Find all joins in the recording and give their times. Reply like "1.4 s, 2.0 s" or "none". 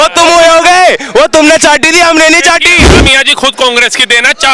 2.9 s